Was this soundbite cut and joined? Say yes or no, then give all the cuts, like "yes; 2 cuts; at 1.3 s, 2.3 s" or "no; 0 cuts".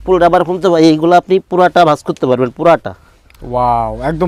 no; 0 cuts